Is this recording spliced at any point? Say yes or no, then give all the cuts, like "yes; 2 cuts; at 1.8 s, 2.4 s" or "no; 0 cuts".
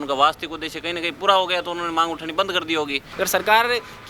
yes; 1 cut; at 3.0 s